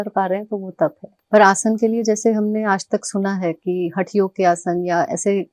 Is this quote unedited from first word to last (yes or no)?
no